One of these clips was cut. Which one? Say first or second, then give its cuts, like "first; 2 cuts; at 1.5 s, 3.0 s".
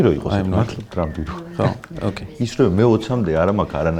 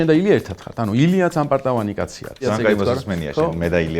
second; 1 cut; at 2.4 s